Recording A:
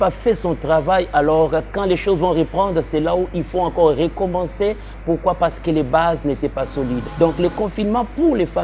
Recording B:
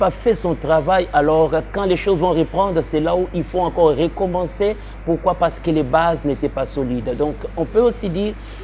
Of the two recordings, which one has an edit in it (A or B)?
A